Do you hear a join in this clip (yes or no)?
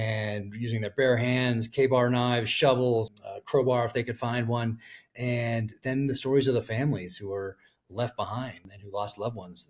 yes